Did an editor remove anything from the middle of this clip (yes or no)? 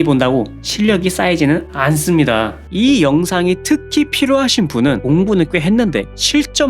yes